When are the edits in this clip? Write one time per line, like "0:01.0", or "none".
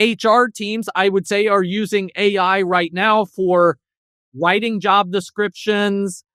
none